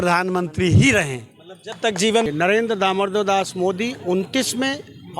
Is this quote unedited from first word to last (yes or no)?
no